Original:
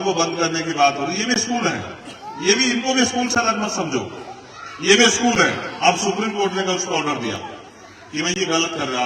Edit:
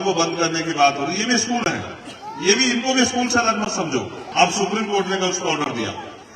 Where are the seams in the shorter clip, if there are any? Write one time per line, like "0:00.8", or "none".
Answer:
0:04.2